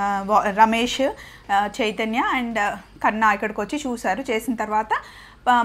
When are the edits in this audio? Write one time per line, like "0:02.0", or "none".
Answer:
none